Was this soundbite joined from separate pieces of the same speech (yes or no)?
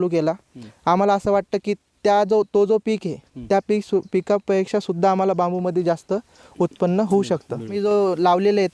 yes